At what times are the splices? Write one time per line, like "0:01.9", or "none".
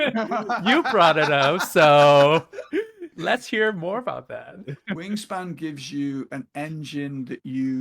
0:05.0